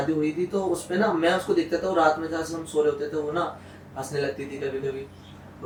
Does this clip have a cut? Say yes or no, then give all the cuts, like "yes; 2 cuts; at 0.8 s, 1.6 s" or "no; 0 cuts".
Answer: no; 0 cuts